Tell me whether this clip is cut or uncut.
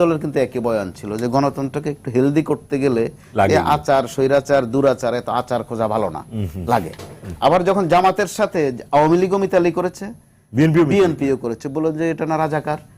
uncut